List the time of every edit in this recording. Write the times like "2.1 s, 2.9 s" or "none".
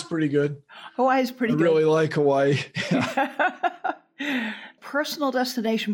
4.6 s